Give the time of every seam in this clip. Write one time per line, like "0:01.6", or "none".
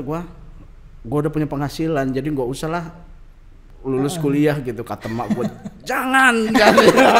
none